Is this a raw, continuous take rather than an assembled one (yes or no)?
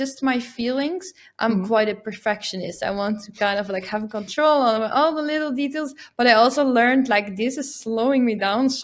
yes